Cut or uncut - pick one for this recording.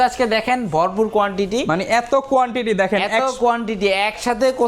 uncut